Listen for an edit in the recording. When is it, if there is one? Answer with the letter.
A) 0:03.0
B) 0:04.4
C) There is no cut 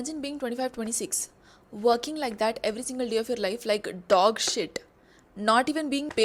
C